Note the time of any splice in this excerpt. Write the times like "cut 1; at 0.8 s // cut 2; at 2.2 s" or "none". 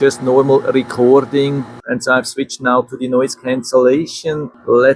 cut 1; at 1.8 s

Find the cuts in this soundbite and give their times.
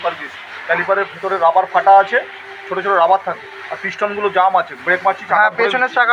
none

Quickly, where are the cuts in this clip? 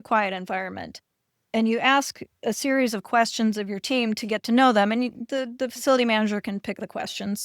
none

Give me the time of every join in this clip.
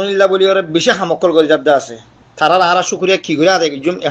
none

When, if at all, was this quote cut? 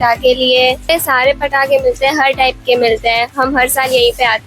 cut 1; at 0.9 s

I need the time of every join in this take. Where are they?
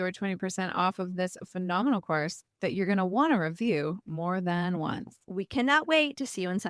cut 1; at 5.1 s

